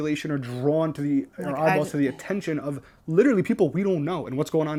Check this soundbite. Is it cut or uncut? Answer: uncut